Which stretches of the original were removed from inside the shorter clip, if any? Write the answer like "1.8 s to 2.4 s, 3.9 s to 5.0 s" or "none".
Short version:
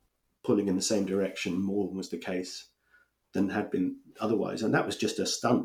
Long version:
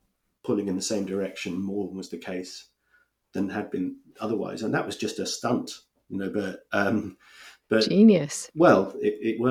none